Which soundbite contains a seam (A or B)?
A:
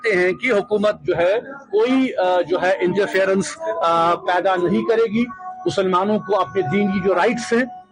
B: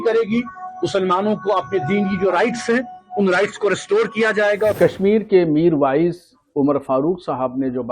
B